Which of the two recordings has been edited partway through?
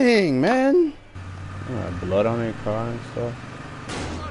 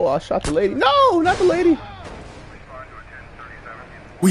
first; 1 cut; at 1.1 s

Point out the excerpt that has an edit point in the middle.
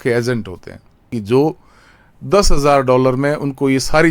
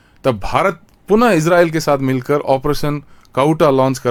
first; 1 cut; at 1.1 s

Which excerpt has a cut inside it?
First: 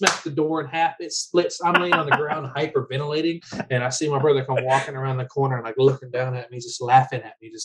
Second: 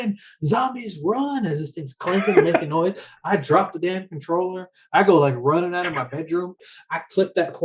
second; 1 cut; at 6.6 s

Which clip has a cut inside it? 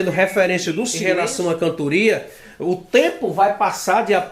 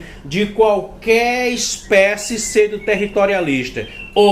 first; 1 cut; at 1.0 s

